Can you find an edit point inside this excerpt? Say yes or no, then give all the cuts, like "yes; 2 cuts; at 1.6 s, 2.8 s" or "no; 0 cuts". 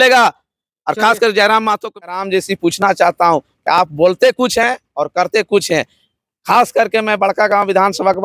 yes; 1 cut; at 2.1 s